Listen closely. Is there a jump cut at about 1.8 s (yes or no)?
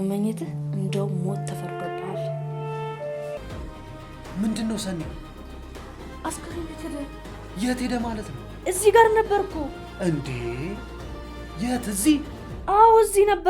no